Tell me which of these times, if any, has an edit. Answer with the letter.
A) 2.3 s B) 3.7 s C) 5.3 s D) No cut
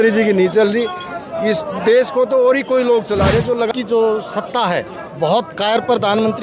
B